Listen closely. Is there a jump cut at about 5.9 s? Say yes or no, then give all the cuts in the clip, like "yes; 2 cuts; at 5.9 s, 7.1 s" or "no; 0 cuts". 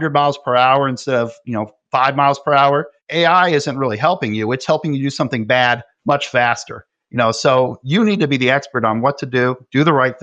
yes; 2 cuts; at 5.9 s, 7.8 s